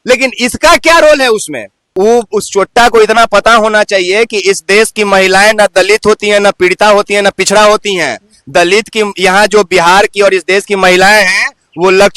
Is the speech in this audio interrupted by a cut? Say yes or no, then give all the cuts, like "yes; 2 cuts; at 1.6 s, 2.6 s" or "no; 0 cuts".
yes; 1 cut; at 1.8 s